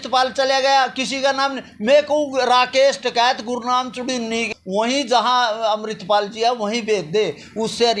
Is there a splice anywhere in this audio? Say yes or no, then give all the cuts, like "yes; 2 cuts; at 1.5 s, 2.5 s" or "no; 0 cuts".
no; 0 cuts